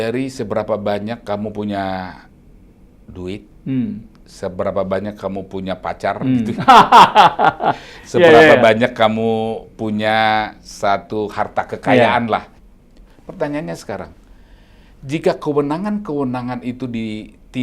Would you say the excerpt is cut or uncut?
cut